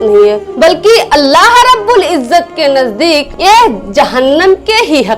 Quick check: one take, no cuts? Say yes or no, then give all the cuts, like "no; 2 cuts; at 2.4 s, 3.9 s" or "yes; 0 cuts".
yes; 0 cuts